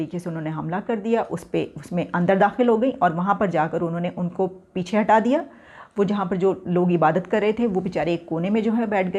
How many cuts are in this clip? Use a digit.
0